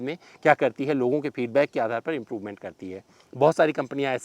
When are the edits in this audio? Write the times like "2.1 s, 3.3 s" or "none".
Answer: none